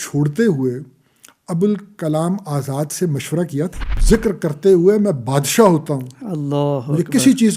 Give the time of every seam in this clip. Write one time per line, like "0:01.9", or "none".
0:04.0